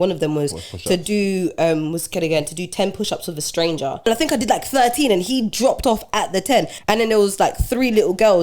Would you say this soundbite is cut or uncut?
cut